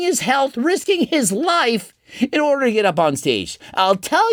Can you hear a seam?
no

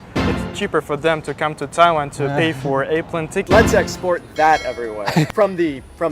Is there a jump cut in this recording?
yes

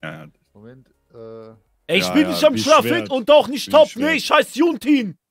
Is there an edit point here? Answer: yes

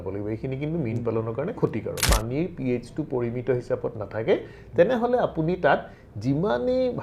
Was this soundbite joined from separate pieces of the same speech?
yes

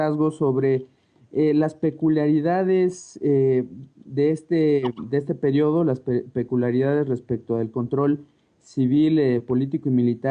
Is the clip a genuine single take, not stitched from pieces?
no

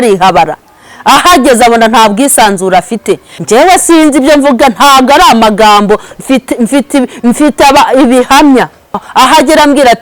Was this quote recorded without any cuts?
no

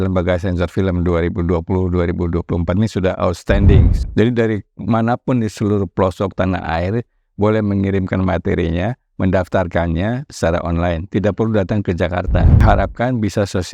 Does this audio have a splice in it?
yes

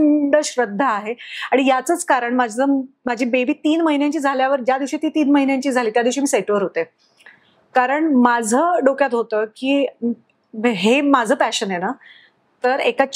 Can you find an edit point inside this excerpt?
no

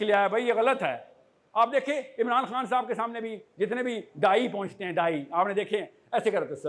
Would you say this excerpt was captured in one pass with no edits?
yes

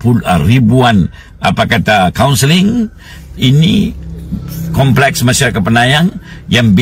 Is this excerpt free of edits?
yes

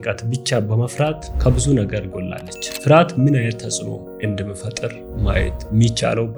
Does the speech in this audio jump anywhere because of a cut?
no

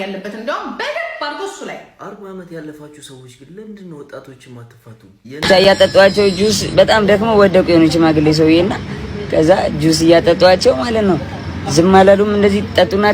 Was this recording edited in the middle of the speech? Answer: yes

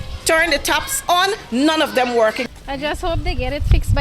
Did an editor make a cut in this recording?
yes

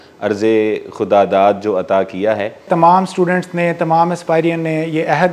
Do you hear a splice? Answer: yes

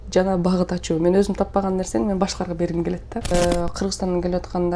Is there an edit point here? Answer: yes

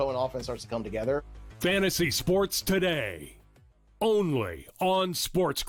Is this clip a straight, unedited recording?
yes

